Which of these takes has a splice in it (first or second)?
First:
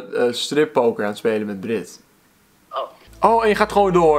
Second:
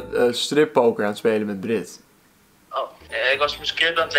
first